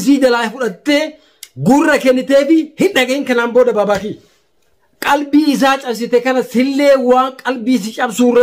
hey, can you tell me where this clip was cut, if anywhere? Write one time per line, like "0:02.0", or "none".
0:04.9